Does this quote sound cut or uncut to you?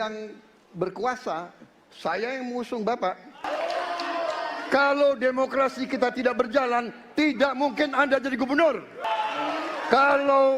cut